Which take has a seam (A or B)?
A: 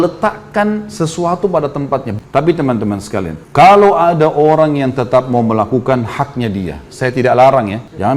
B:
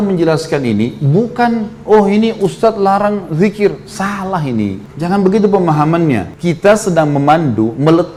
A